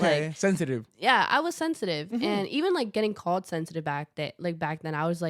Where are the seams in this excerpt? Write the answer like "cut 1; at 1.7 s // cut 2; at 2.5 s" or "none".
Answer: none